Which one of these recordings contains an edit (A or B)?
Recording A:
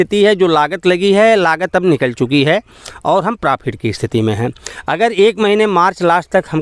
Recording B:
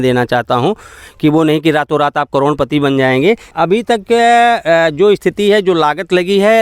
B